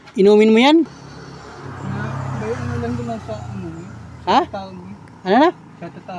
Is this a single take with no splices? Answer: no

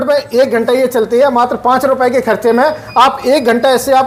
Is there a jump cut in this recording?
no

